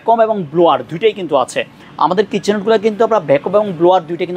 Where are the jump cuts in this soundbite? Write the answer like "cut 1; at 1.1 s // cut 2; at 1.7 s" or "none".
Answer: none